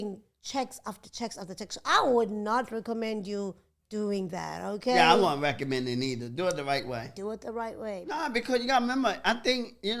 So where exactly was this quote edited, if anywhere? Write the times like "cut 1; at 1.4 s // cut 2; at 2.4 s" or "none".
cut 1; at 8.0 s